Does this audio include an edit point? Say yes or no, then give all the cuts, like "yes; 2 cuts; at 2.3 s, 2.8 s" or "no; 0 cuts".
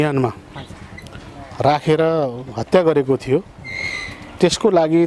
no; 0 cuts